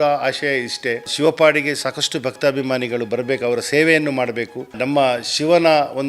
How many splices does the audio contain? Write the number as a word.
two